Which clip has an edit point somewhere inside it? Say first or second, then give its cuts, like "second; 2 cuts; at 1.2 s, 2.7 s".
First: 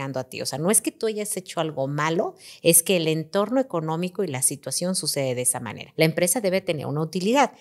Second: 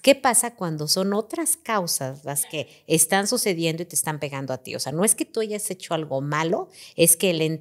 first; 1 cut; at 5.8 s